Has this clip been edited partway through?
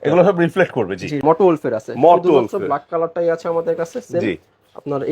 yes; 1 cut; at 1.2 s

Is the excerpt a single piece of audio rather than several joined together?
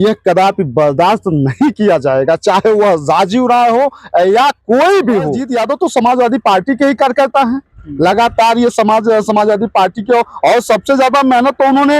no; 1 cut; at 5.4 s

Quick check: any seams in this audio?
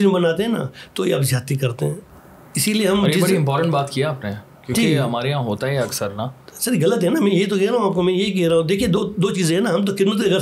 no; 0 cuts

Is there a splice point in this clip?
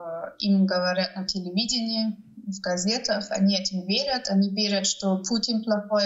no; 0 cuts

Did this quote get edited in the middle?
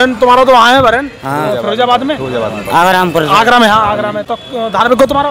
no; 0 cuts

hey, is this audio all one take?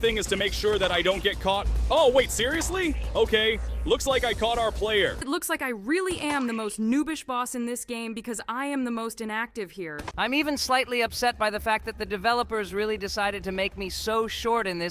no; 2 cuts; at 5.2 s, 10.0 s

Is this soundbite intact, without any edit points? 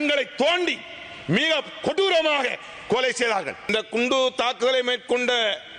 no; 1 cut; at 3.7 s

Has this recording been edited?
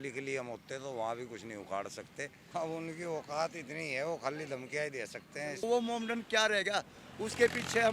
yes; 2 cuts; at 2.3 s, 5.6 s

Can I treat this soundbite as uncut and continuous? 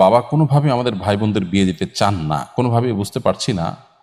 yes; 0 cuts

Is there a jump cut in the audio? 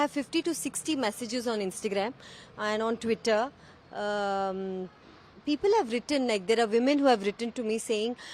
no; 0 cuts

